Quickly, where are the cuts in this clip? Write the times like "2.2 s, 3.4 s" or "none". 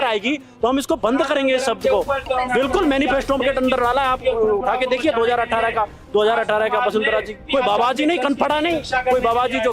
2.2 s, 7.4 s